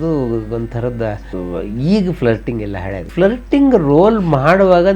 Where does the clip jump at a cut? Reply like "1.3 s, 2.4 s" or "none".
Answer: 1.3 s, 3.1 s